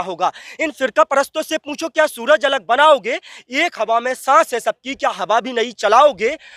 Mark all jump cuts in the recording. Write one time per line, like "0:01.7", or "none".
none